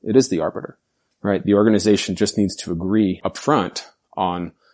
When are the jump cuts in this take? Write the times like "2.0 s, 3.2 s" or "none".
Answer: 3.3 s